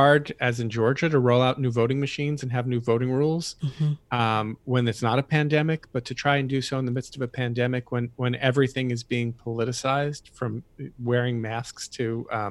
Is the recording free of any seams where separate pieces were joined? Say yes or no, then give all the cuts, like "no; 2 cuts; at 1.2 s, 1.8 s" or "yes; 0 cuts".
yes; 0 cuts